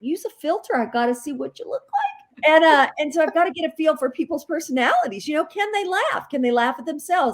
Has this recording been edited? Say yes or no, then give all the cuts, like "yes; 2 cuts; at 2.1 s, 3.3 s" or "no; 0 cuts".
yes; 1 cut; at 2.2 s